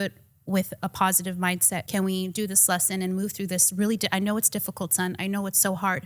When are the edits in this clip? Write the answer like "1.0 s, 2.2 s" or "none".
1.8 s